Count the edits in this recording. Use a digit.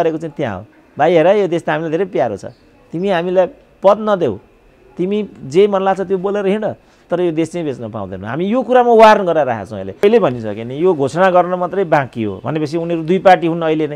1